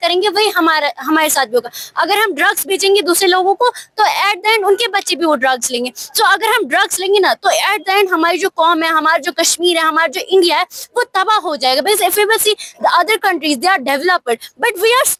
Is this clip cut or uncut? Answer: uncut